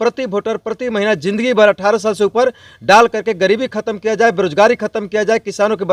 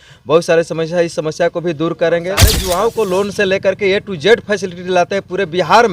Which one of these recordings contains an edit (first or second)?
second